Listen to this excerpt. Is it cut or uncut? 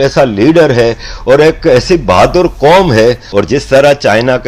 cut